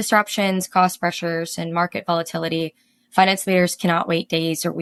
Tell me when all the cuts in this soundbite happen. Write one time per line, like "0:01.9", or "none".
none